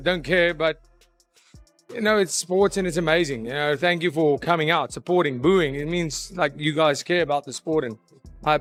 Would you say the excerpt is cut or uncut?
uncut